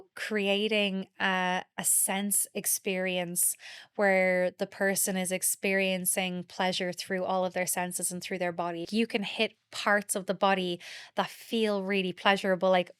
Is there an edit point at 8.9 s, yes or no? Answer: yes